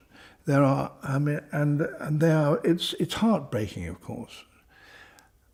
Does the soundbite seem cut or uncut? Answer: uncut